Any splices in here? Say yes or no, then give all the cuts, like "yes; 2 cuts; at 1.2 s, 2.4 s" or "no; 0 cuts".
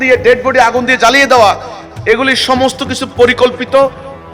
no; 0 cuts